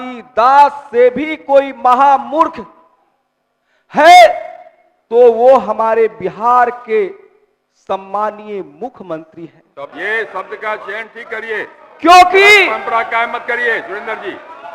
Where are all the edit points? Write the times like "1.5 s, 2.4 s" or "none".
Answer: 9.9 s